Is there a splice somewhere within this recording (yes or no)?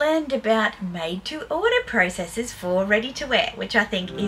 no